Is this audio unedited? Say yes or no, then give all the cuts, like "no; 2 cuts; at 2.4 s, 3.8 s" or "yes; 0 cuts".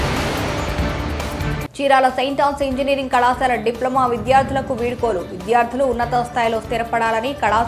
no; 1 cut; at 1.6 s